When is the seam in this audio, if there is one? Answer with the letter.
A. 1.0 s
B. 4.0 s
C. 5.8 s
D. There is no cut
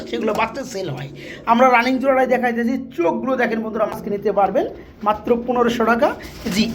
B